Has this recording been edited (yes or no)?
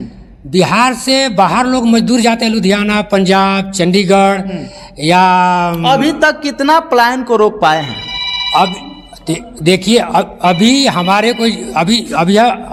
no